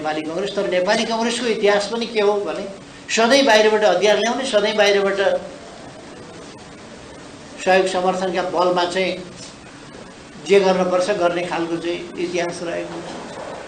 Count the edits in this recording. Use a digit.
0